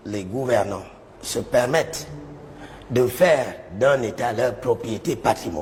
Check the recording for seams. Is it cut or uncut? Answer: uncut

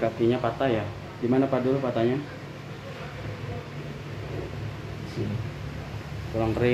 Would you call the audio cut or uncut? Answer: uncut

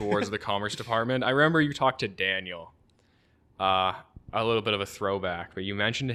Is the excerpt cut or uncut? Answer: uncut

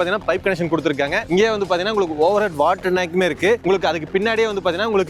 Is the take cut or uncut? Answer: uncut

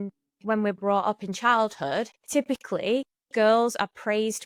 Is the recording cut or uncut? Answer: uncut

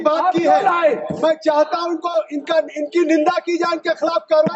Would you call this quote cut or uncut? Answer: uncut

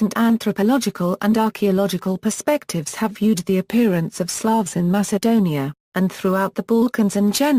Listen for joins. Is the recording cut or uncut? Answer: uncut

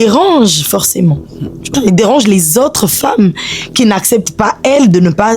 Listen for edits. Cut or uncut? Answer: cut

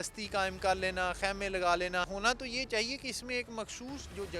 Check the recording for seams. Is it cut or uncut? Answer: cut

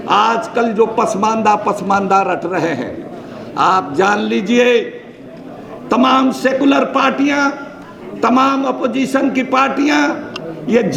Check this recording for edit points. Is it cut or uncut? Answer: uncut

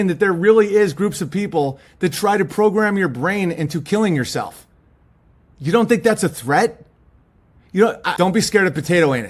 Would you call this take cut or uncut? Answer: uncut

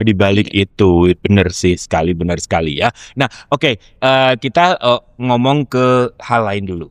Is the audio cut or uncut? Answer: uncut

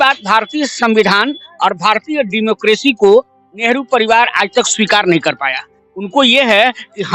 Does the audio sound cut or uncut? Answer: uncut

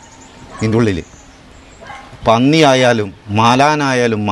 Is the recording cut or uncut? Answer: uncut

